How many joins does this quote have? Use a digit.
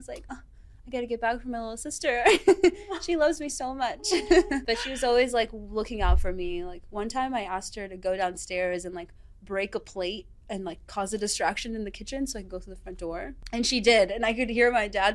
2